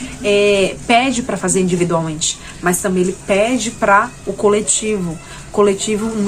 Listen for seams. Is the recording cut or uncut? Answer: uncut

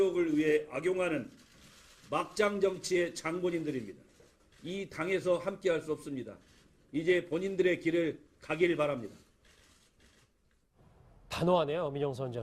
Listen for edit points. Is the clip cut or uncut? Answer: cut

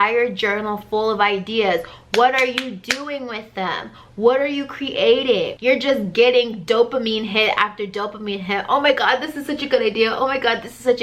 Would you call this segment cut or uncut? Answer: cut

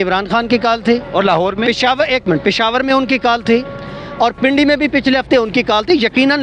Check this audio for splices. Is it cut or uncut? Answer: uncut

